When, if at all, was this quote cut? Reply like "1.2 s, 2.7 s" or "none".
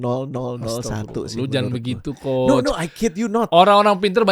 none